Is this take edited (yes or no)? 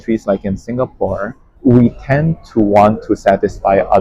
yes